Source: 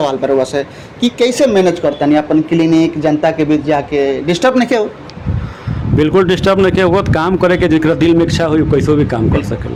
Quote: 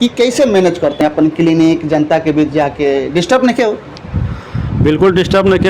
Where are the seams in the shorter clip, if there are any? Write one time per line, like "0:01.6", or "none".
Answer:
0:01.0